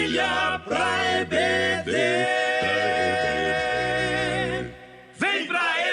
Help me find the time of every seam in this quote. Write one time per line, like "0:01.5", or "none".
0:02.5